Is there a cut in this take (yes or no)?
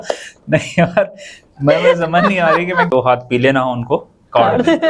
yes